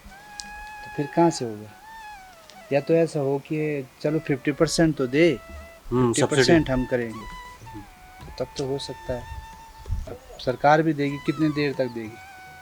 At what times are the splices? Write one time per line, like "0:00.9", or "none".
0:10.1